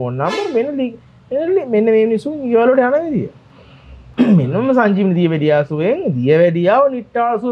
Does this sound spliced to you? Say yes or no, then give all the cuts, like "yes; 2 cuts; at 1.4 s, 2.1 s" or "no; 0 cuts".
no; 0 cuts